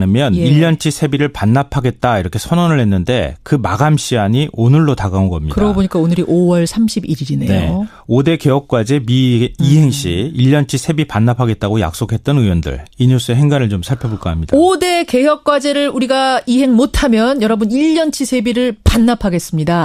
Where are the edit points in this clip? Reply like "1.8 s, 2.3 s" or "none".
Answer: 16.4 s